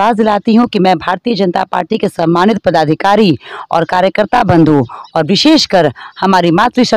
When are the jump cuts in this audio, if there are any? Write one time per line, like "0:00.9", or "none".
none